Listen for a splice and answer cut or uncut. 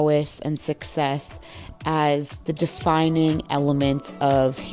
uncut